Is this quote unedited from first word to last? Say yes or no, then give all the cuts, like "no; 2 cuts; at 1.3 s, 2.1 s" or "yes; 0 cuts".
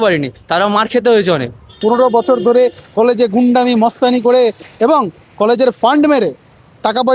no; 1 cut; at 1.8 s